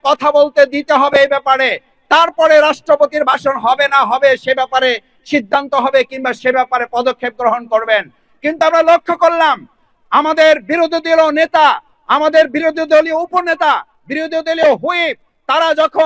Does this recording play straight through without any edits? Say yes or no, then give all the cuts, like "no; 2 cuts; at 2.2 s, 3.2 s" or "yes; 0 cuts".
yes; 0 cuts